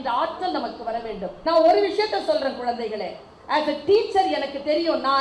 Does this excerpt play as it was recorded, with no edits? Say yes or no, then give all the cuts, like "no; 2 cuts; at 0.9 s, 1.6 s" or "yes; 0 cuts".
no; 1 cut; at 1.3 s